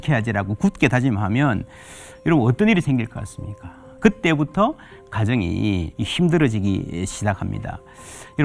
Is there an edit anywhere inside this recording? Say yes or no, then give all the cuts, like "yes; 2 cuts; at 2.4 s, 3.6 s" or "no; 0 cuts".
yes; 2 cuts; at 3.8 s, 6.0 s